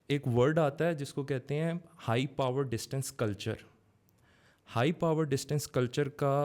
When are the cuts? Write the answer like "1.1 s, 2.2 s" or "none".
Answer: none